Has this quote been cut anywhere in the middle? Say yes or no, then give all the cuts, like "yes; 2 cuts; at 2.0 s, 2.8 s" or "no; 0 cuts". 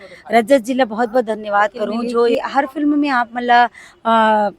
yes; 1 cut; at 2.4 s